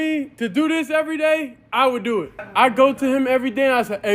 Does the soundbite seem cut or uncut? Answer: cut